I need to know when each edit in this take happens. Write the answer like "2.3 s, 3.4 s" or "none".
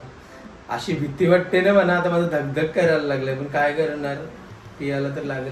none